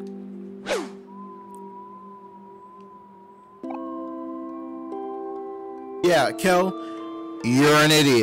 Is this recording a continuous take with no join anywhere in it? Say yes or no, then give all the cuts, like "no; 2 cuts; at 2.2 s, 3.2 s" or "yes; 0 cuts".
no; 1 cut; at 6.0 s